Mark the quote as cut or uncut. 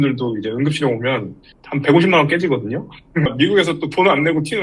cut